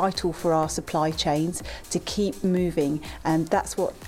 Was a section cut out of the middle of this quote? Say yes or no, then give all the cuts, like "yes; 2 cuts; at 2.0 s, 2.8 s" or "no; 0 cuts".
no; 0 cuts